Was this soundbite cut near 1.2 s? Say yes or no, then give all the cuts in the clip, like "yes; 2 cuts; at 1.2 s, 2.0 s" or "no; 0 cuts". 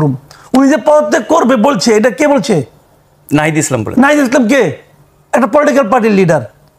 no; 0 cuts